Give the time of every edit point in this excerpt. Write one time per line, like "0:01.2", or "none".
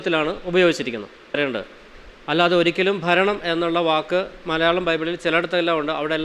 0:01.4